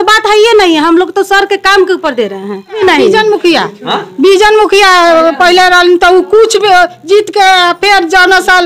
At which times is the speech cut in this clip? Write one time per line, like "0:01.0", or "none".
0:02.8